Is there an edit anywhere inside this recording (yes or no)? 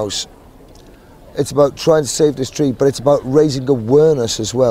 no